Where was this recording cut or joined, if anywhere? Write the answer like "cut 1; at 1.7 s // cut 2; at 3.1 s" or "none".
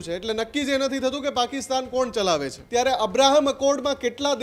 cut 1; at 2.6 s